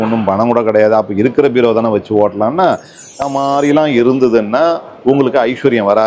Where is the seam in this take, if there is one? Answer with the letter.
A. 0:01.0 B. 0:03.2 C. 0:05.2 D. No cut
B